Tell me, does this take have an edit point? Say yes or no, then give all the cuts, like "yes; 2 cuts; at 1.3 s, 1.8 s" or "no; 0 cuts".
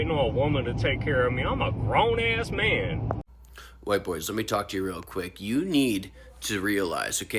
yes; 1 cut; at 3.3 s